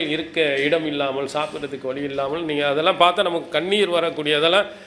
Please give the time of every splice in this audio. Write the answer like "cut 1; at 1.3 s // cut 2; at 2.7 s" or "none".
none